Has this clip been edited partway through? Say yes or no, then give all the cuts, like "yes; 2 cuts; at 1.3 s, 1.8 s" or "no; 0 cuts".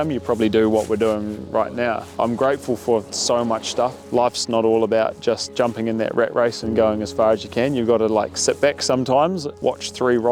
yes; 3 cuts; at 2.1 s, 4.0 s, 9.5 s